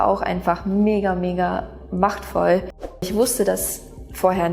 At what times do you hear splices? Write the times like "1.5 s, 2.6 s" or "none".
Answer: 3.1 s